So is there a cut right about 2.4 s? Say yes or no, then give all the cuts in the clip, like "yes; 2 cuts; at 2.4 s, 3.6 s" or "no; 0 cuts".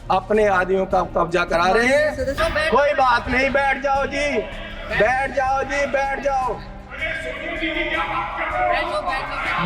yes; 1 cut; at 2.4 s